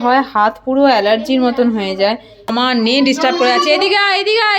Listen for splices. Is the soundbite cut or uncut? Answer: cut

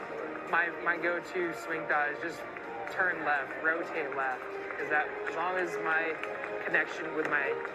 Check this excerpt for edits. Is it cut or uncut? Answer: uncut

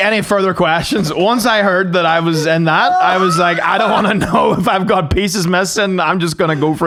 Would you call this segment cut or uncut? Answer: uncut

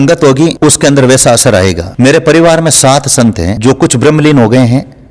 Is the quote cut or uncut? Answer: uncut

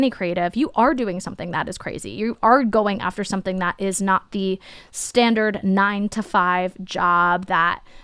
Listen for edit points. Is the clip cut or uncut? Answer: uncut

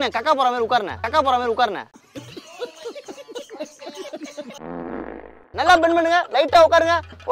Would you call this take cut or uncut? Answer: cut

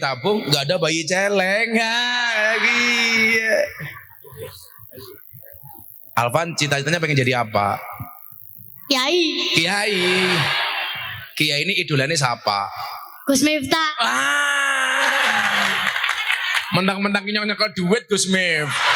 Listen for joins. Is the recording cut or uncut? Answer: uncut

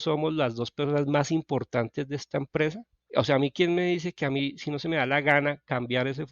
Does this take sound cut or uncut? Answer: cut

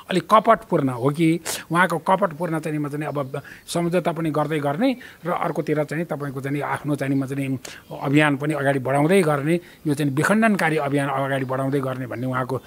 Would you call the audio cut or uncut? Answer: uncut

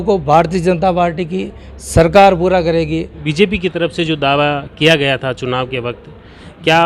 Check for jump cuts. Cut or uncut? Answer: cut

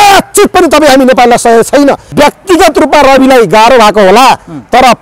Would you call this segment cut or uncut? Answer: cut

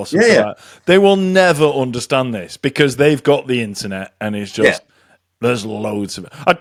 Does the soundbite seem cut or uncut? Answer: uncut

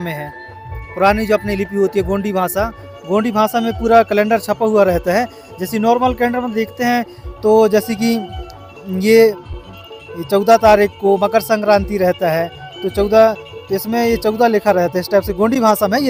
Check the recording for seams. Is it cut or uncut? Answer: uncut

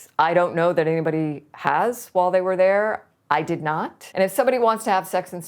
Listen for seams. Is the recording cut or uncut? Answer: cut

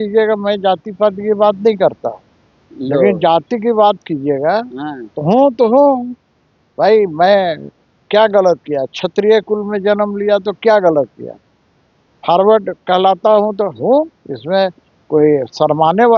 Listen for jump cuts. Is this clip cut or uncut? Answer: uncut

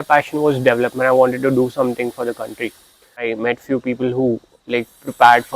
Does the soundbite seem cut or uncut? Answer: cut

